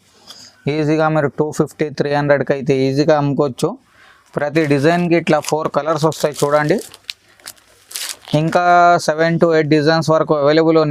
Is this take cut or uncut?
uncut